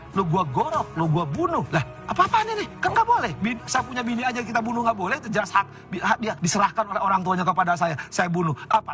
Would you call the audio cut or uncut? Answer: cut